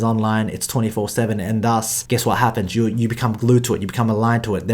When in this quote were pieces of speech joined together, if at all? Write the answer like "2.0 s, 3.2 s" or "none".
2.0 s